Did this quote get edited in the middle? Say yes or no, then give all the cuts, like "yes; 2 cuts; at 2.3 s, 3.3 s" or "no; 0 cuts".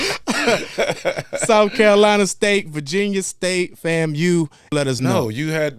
yes; 1 cut; at 4.6 s